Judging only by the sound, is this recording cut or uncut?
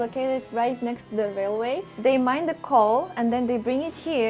cut